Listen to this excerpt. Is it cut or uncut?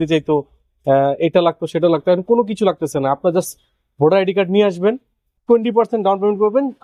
uncut